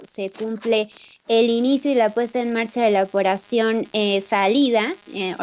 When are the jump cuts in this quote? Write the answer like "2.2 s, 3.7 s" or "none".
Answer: 4.0 s